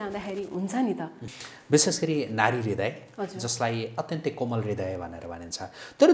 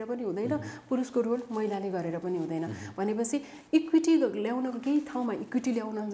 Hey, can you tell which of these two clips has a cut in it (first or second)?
first